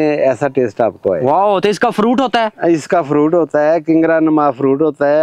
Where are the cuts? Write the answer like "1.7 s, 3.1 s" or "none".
none